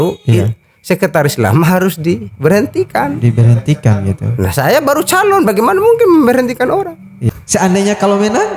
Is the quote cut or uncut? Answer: cut